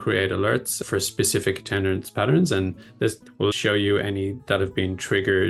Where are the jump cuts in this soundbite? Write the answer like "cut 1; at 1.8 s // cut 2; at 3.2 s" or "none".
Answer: none